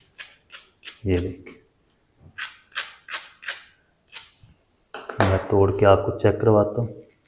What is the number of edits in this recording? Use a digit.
0